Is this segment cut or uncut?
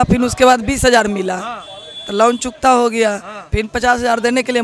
uncut